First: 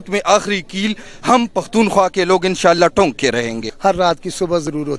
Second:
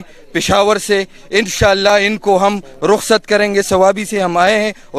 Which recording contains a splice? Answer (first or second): first